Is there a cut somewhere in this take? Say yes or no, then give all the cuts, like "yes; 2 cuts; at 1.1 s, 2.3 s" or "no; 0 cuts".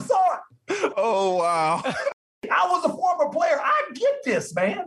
yes; 1 cut; at 2.4 s